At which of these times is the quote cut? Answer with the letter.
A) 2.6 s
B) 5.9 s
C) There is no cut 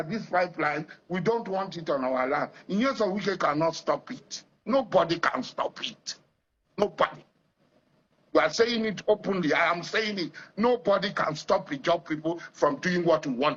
C